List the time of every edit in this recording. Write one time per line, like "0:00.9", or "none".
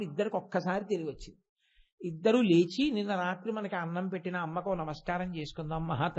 none